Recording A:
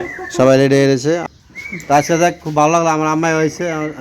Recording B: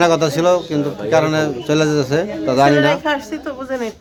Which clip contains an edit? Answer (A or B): A